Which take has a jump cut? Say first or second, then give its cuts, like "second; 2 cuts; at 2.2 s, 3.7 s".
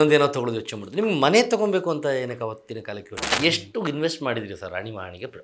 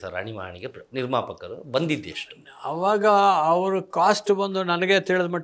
first; 1 cut; at 3.2 s